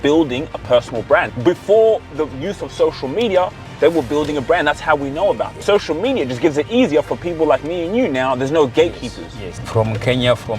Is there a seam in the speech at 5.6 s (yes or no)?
yes